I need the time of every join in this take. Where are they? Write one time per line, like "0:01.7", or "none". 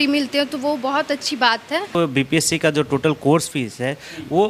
0:02.0